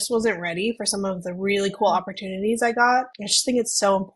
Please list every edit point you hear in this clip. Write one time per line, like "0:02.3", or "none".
none